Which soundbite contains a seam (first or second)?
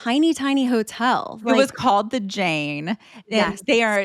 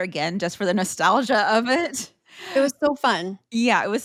first